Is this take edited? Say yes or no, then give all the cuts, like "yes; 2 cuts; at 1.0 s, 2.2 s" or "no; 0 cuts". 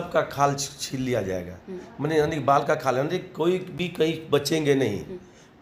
no; 0 cuts